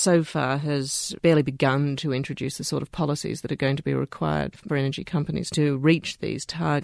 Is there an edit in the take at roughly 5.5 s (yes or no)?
yes